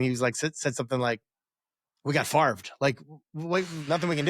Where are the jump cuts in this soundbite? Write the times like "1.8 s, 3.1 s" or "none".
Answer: none